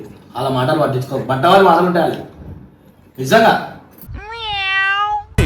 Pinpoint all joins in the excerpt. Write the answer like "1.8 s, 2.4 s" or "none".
none